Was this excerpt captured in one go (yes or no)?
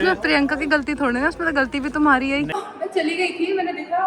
no